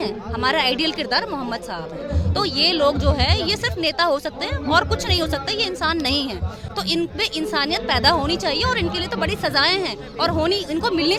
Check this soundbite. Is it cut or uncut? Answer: uncut